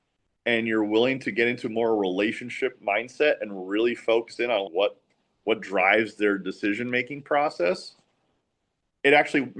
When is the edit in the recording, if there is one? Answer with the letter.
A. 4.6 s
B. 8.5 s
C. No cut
A